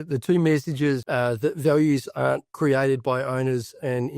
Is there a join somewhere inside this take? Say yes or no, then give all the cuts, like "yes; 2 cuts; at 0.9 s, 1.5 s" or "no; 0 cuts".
yes; 1 cut; at 1.0 s